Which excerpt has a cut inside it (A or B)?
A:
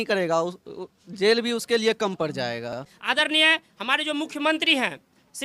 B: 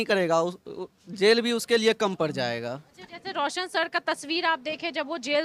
A